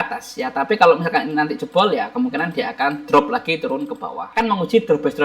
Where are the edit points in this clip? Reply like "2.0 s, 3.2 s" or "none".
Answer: 4.2 s